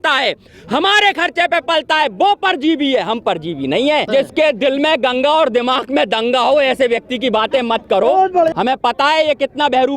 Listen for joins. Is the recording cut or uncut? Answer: cut